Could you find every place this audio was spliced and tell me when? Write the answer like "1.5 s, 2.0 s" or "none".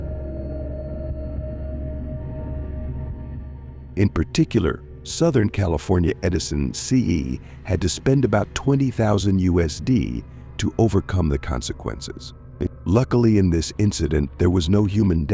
4.1 s